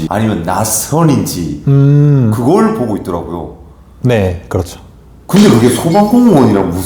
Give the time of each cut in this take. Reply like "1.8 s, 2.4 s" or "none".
none